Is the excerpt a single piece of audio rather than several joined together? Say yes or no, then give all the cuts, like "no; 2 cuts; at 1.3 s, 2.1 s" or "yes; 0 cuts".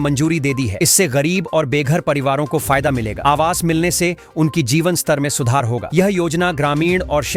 yes; 0 cuts